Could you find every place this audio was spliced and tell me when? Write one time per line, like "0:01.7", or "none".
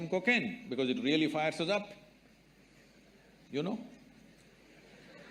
none